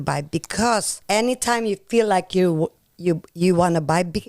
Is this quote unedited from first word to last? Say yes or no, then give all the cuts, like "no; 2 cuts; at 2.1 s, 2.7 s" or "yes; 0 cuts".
no; 1 cut; at 0.9 s